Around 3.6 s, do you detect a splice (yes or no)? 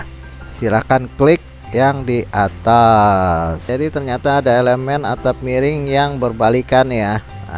yes